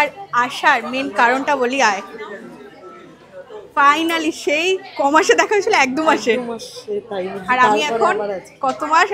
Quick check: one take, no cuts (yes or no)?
yes